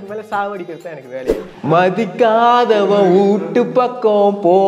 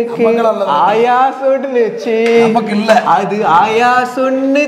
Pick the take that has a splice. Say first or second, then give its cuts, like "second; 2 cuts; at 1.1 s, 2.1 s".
first; 1 cut; at 1.3 s